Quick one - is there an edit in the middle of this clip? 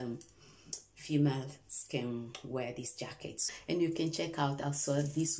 yes; 1 cut; at 3.5 s

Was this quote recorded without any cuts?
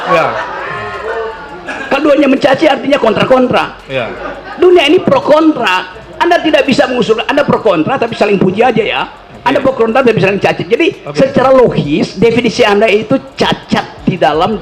yes; 0 cuts

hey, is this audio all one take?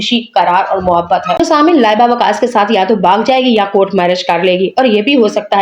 no; 1 cut; at 1.3 s

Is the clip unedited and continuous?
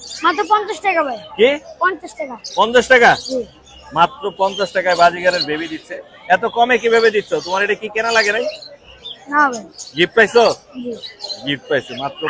yes; 0 cuts

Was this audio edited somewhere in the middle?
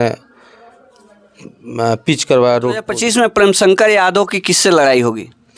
yes; 1 cut; at 2.9 s

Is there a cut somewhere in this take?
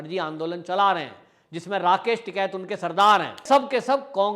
yes; 1 cut; at 3.4 s

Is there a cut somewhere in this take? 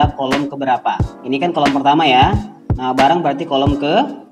yes; 1 cut; at 1.1 s

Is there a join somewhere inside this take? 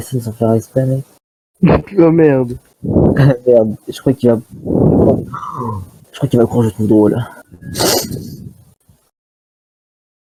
no; 0 cuts

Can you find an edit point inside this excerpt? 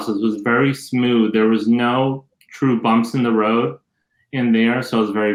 no; 0 cuts

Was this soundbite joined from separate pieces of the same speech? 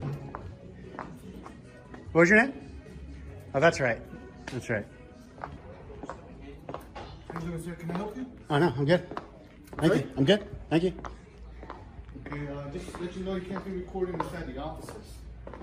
no; 0 cuts

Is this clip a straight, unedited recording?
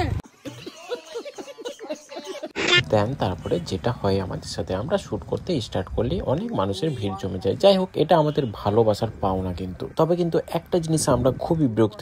yes; 0 cuts

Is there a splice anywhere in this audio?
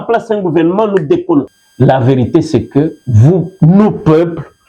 yes; 1 cut; at 1.5 s

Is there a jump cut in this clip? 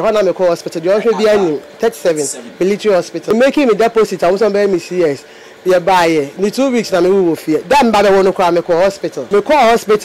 yes; 2 cuts; at 3.2 s, 9.1 s

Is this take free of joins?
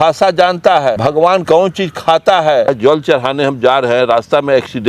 no; 2 cuts; at 1.3 s, 2.7 s

